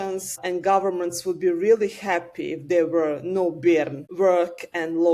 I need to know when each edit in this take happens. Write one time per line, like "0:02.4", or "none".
none

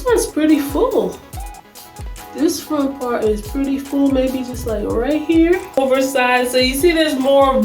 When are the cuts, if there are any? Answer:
0:05.8

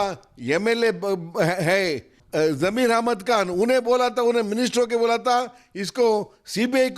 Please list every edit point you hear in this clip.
0:02.1

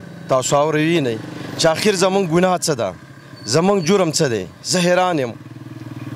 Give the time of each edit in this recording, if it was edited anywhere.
none

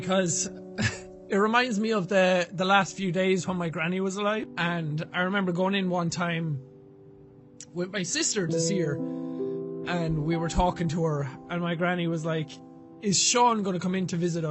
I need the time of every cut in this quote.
0:04.5

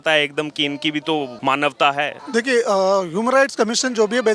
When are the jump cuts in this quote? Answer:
0:01.3
0:02.2

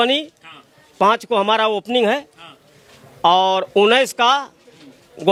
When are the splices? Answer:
none

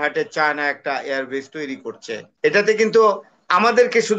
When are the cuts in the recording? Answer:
0:02.2

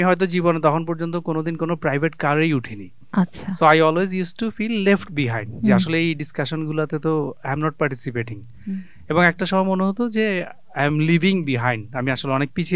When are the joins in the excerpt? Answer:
none

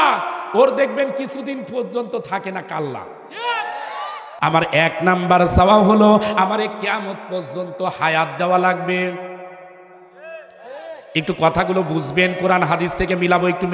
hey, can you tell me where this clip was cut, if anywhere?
0:04.3

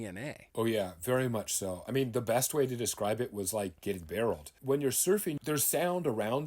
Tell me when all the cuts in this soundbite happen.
0:01.8
0:04.5
0:05.4

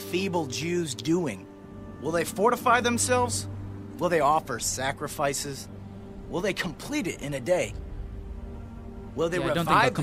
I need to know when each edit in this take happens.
none

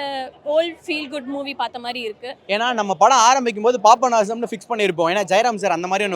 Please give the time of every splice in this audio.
0:02.3

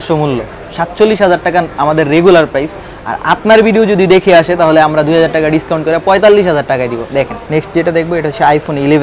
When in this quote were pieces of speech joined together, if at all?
0:07.4

